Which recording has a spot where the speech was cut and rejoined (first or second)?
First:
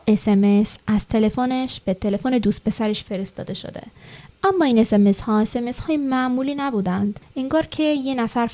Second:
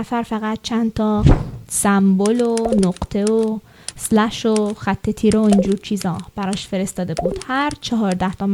first